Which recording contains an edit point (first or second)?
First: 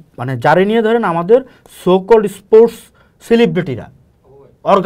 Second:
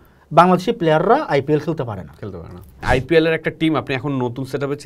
second